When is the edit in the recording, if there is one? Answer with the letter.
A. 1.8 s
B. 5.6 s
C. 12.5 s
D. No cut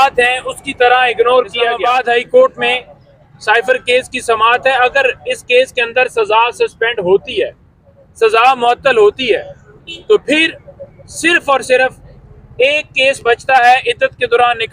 A